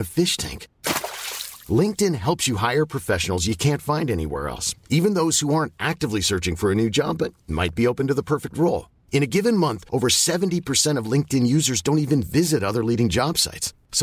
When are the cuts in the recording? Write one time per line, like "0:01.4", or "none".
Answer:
none